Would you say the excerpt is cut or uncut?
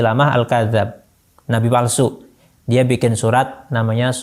uncut